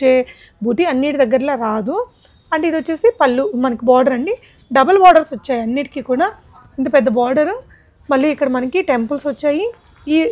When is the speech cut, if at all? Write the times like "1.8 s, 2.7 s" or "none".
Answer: none